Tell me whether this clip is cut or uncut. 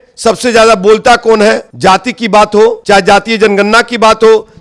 cut